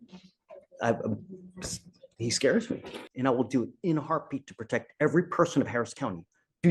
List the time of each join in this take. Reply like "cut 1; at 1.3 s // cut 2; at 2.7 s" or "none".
cut 1; at 3.0 s